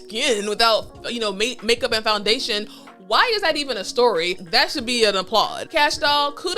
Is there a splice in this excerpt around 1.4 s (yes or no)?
no